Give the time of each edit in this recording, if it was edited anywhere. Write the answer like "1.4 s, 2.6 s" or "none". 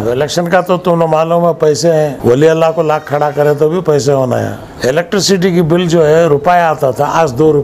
2.2 s, 4.6 s